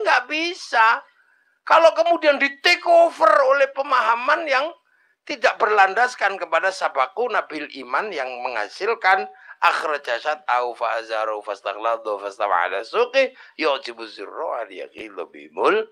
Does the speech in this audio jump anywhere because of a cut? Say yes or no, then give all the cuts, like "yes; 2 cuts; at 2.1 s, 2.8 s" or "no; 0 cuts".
no; 0 cuts